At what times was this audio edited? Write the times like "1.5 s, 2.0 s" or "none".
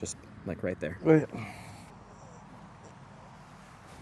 1.9 s